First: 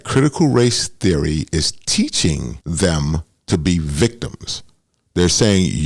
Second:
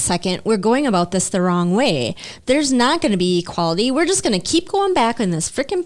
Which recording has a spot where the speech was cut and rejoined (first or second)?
first